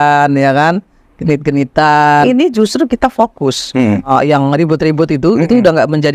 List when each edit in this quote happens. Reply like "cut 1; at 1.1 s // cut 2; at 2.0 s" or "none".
cut 1; at 2.2 s // cut 2; at 4.1 s